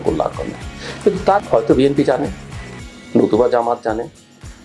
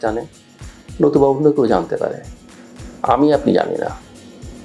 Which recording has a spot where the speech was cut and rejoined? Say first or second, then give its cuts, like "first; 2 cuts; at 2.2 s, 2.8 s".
first; 1 cut; at 1.4 s